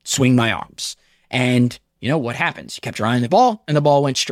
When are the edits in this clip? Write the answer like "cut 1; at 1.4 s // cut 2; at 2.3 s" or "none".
none